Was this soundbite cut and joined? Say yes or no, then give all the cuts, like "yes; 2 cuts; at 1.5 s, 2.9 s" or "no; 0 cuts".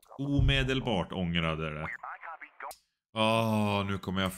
yes; 1 cut; at 2.7 s